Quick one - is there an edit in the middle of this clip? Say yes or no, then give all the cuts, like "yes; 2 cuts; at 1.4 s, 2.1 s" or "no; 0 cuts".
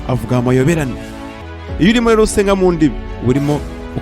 yes; 1 cut; at 3.1 s